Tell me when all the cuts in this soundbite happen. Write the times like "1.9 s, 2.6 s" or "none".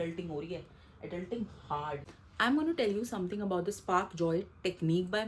2.0 s